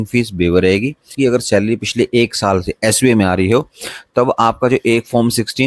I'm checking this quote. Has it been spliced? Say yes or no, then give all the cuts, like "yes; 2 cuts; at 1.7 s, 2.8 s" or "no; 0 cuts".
yes; 1 cut; at 1.1 s